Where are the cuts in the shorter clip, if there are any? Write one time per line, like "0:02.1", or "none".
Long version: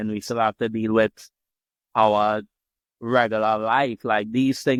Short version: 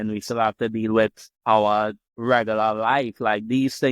0:01.3
0:02.1